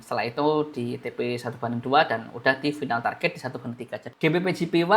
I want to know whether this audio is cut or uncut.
cut